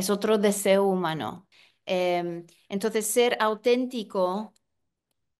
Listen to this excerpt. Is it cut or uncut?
cut